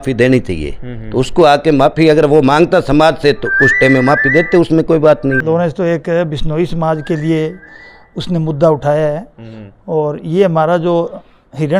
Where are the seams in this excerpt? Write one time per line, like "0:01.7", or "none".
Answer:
0:05.4